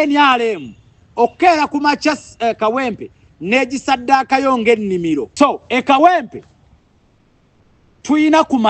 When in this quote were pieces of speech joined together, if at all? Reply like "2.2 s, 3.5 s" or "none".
5.3 s